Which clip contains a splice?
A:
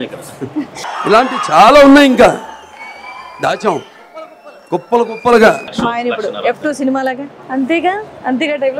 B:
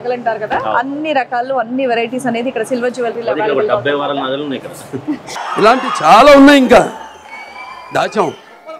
A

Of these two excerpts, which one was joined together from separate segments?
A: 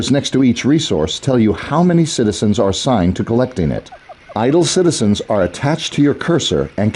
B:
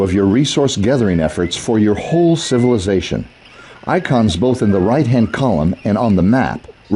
B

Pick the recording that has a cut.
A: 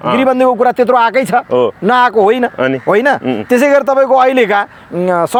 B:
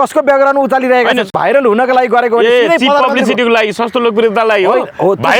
B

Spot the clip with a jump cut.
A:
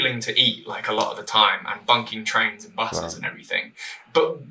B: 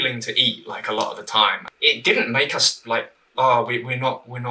B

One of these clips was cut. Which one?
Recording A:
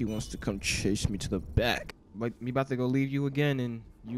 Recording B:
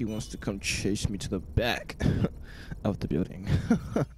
A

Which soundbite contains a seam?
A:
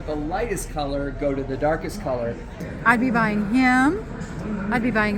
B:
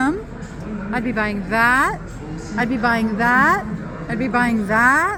A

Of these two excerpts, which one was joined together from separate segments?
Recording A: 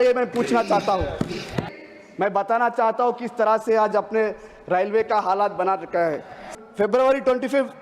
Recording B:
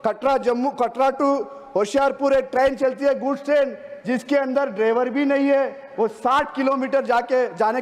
A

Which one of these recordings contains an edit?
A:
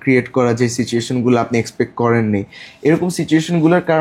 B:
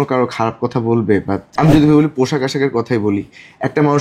B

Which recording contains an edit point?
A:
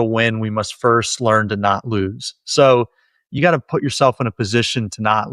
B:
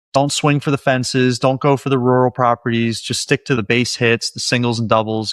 B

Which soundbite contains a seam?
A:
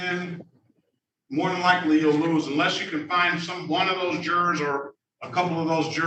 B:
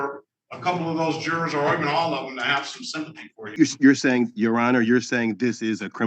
B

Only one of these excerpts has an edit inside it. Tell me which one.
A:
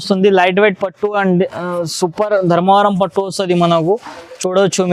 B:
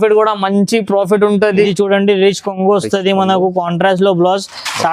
B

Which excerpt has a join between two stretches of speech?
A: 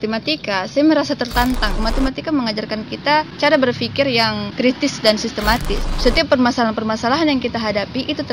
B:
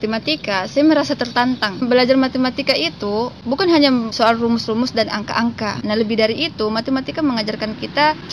A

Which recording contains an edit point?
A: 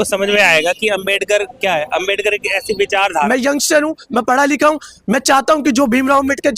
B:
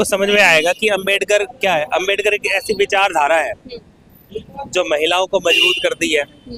A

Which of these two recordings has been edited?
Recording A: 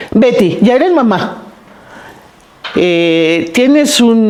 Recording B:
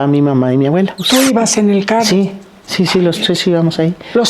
B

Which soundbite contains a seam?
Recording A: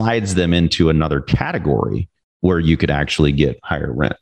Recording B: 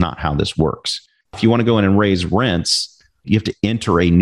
B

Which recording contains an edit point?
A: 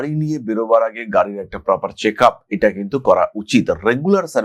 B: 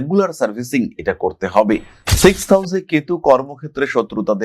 B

